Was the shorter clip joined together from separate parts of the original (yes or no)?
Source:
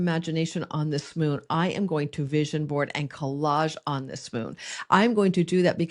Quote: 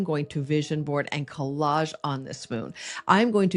no